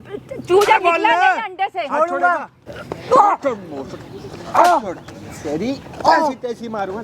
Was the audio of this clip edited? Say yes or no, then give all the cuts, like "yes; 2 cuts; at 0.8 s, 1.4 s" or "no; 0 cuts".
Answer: yes; 1 cut; at 2.5 s